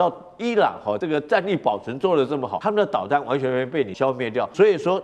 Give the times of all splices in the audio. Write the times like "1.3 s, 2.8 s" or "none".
1.0 s, 2.5 s, 4.1 s